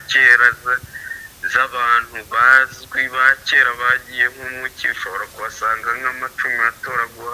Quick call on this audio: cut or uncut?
uncut